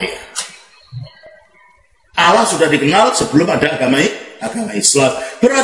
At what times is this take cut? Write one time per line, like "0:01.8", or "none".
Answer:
0:01.5